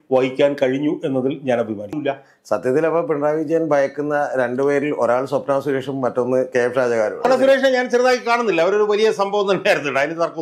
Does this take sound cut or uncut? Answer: cut